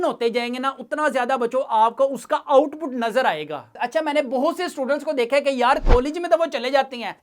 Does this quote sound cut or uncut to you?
cut